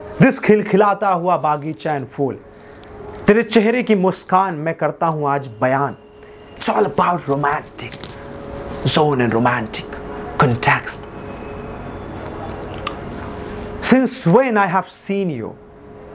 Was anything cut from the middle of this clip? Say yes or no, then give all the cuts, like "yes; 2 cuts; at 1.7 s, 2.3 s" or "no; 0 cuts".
no; 0 cuts